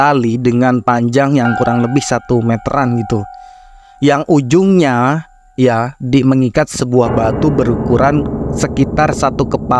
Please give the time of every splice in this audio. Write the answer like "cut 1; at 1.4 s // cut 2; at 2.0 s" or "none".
none